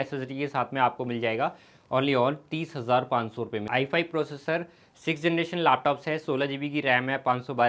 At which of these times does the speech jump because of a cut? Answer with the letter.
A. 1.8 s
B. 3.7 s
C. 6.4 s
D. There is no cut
B